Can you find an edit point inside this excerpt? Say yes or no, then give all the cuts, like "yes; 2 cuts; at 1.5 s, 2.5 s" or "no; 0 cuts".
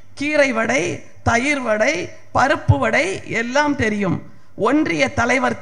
no; 0 cuts